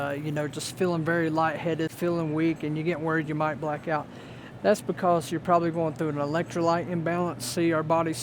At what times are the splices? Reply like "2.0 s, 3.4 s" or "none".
none